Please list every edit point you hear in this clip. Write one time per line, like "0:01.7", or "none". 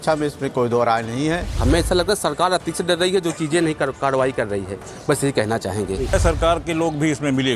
0:01.5
0:06.1